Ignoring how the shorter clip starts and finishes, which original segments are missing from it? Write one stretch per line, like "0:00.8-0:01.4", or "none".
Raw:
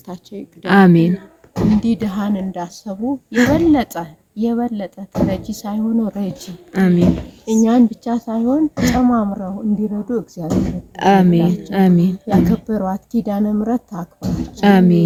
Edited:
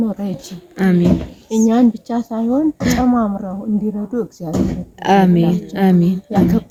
none